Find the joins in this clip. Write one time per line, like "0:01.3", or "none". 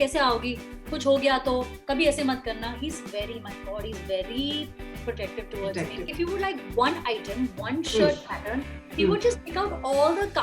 0:06.1